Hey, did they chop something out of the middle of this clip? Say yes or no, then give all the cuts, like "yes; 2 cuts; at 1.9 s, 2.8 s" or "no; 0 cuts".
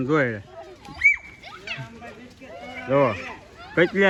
no; 0 cuts